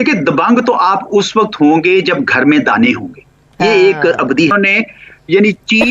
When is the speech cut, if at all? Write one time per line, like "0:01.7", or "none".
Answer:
0:04.5